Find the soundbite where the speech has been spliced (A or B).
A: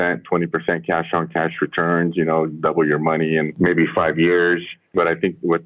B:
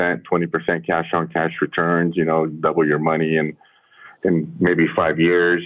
A